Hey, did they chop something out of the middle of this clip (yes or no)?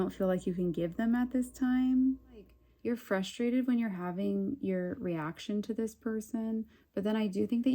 yes